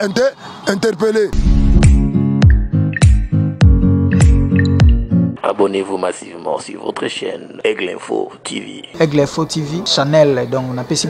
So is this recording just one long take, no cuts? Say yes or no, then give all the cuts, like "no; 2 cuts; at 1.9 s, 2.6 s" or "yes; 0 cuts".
no; 1 cut; at 1.4 s